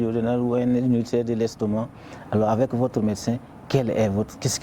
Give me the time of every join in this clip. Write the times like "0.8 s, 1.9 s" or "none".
none